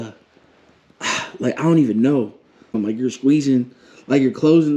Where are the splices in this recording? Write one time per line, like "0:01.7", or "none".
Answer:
0:02.8